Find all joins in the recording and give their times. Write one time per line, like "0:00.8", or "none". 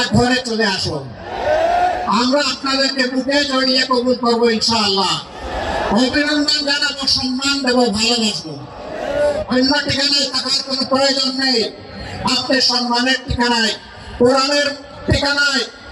none